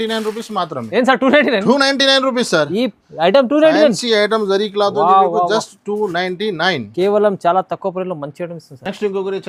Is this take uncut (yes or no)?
yes